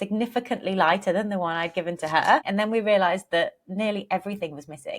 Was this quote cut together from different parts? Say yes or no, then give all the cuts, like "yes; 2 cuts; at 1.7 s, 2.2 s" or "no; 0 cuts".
yes; 1 cut; at 2.5 s